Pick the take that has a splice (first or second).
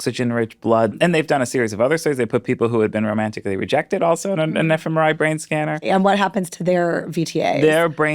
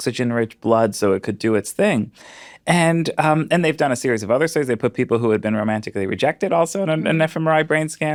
first